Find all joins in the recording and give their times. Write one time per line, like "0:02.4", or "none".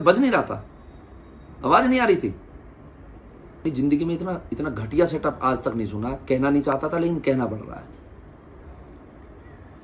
none